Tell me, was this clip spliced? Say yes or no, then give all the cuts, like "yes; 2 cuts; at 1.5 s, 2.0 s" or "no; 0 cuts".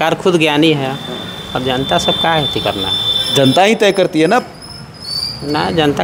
no; 0 cuts